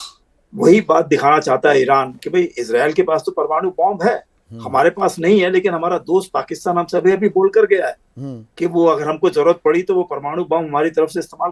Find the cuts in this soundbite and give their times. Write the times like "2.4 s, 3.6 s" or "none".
none

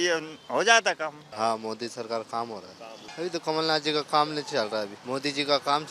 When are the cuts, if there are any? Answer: 1.2 s, 3.0 s, 5.0 s

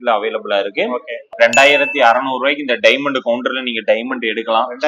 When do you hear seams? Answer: 1.2 s

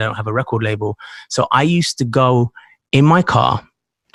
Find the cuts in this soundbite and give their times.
none

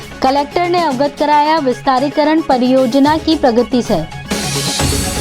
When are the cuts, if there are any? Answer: none

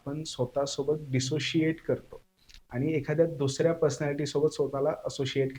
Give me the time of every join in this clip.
none

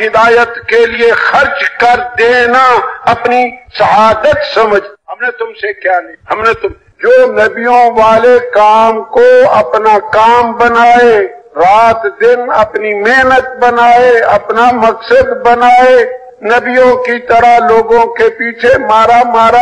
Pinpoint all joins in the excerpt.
6.9 s

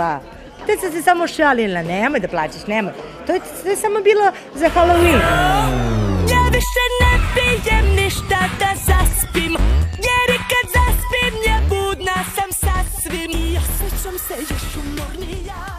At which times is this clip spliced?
none

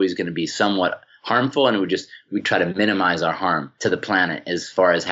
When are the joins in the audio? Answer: 2.2 s, 3.7 s

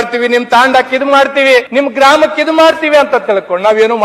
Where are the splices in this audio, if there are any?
1.7 s

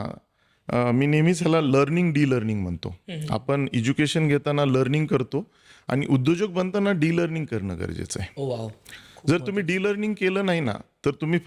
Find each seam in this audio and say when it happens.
none

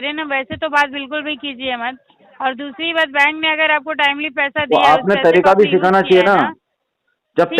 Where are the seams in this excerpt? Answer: none

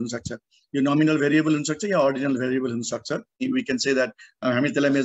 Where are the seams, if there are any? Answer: 3.4 s

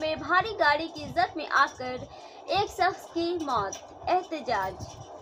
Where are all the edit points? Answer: none

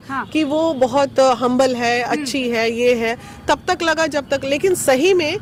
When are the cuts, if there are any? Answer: none

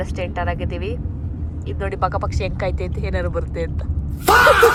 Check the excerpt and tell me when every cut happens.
none

